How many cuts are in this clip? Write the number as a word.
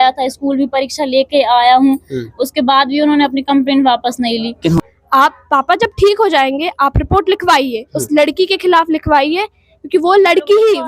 one